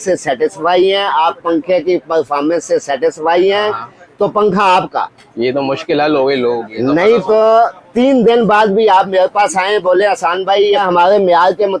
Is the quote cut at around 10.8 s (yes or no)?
yes